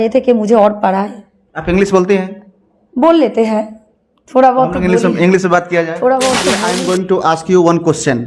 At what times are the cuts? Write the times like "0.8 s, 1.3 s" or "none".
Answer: 6.6 s